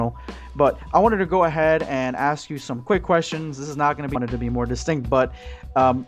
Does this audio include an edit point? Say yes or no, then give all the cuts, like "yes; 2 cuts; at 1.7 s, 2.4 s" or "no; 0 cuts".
no; 0 cuts